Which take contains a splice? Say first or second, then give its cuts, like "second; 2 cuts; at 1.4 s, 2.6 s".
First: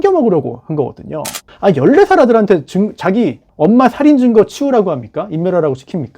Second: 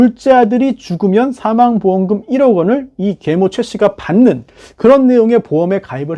first; 2 cuts; at 1.5 s, 3.4 s